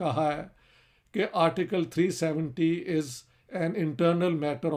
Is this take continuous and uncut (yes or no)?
yes